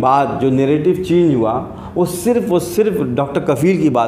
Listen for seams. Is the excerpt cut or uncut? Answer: uncut